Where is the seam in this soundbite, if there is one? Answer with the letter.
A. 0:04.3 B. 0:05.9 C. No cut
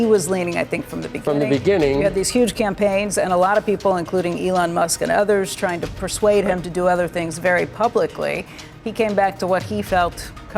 B